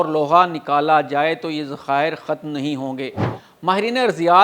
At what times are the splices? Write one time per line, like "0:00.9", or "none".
0:03.3

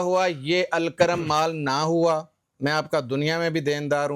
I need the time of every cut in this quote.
0:02.4

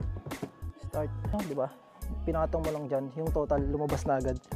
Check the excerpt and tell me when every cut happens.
0:01.3

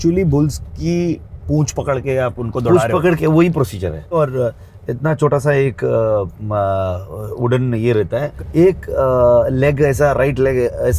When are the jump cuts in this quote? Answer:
0:04.1
0:08.3

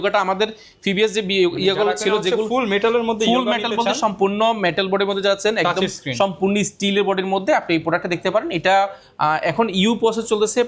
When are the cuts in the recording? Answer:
none

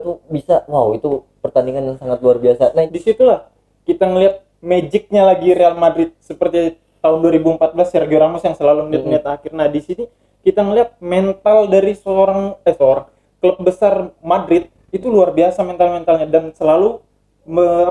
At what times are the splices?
0:02.9

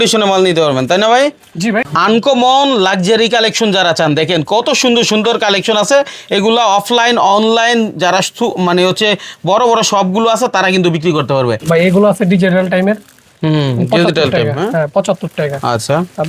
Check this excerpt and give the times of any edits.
0:01.8
0:11.6

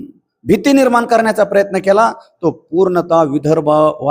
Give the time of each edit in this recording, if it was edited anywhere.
none

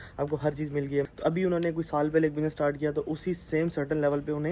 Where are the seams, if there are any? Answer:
0:01.1

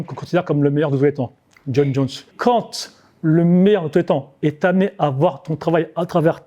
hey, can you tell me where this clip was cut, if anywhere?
0:02.3

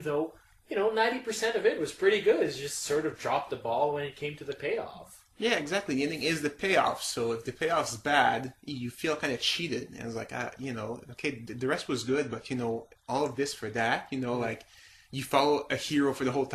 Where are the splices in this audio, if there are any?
0:06.2

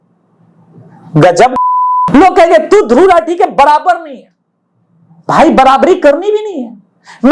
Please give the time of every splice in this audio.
0:02.1

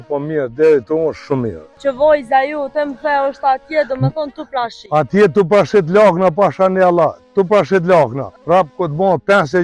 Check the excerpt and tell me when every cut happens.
0:01.6
0:08.3

